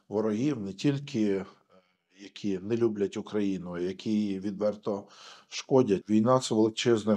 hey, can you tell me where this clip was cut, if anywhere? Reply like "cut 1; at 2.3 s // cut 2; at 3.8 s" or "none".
cut 1; at 6.0 s